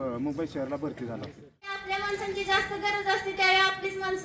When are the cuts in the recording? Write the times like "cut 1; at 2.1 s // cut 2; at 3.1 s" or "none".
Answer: cut 1; at 1.8 s